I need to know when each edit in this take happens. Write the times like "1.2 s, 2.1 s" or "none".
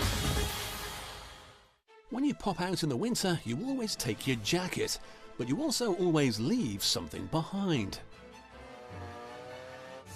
1.4 s